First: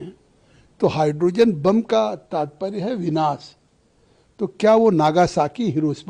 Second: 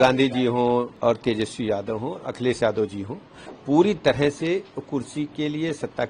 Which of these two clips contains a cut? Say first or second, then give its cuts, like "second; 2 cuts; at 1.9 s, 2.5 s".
second; 1 cut; at 0.9 s